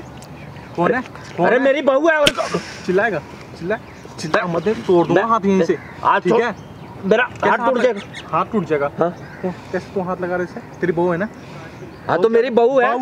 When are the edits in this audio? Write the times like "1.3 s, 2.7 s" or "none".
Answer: none

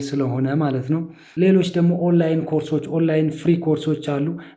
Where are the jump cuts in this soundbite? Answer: 1.2 s

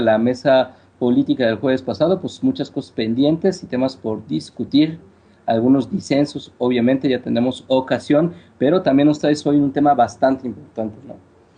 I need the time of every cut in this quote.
none

